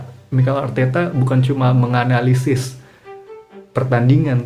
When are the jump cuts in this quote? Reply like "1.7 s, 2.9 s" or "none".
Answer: none